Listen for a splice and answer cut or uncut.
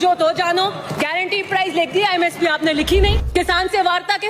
cut